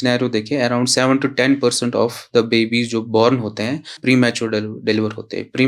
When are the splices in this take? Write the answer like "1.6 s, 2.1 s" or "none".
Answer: 3.9 s